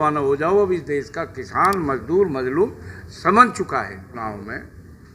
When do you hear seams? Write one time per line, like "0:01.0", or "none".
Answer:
0:04.1